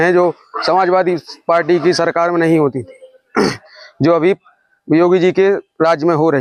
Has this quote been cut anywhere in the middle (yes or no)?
no